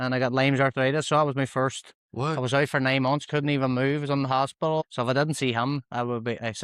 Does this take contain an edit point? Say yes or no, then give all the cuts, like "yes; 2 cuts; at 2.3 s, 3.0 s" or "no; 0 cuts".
yes; 1 cut; at 4.8 s